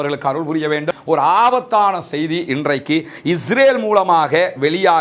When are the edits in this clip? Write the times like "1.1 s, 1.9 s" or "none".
0.9 s

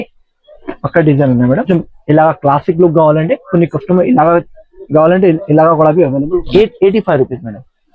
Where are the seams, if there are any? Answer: 1.7 s, 6.5 s

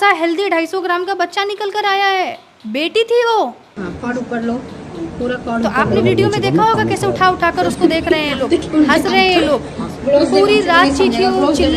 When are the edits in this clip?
none

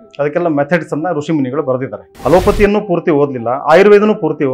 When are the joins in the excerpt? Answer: 2.0 s

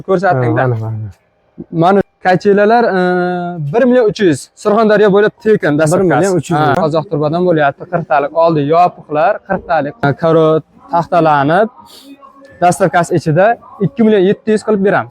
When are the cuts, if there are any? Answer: 2.1 s, 6.8 s, 10.0 s

